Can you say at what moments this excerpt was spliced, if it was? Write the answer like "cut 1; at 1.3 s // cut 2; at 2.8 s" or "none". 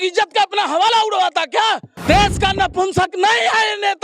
cut 1; at 1.9 s